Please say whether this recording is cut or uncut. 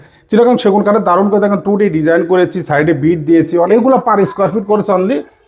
cut